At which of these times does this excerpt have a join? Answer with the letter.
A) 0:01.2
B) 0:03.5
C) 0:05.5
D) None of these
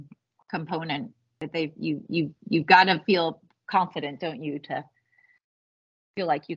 A